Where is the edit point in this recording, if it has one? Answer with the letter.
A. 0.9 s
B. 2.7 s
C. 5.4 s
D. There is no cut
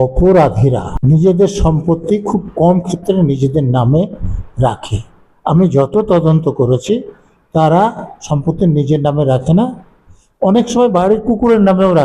A